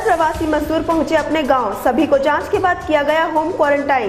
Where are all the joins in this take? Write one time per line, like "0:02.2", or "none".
none